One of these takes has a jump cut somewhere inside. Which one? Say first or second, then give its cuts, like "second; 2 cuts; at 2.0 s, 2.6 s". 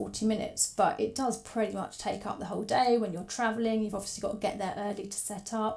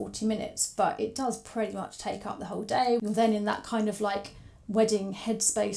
second; 1 cut; at 3.0 s